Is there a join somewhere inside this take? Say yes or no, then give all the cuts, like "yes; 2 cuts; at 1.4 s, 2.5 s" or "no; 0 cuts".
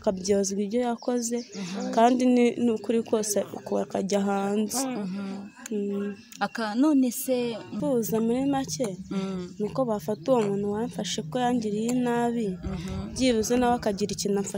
yes; 1 cut; at 7.7 s